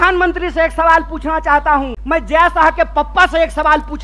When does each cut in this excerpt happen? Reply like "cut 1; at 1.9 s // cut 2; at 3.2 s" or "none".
cut 1; at 2.0 s